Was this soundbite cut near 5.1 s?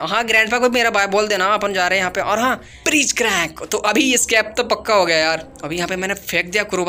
no; 1 cut; at 2.5 s

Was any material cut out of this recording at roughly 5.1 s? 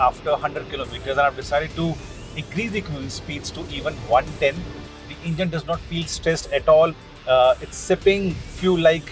yes; 1 cut; at 5.1 s

